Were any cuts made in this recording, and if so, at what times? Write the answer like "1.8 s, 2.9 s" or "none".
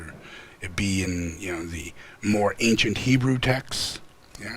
none